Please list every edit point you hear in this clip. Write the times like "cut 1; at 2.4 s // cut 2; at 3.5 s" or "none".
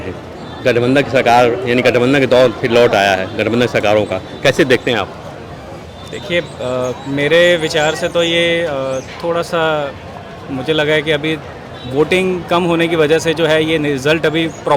none